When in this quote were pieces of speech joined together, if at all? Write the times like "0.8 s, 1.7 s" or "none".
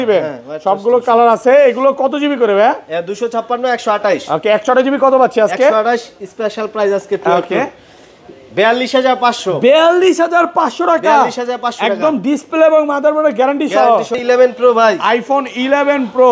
14.2 s